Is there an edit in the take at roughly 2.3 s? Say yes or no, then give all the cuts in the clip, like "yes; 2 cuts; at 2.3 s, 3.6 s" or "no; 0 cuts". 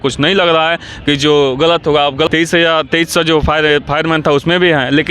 yes; 1 cut; at 2.3 s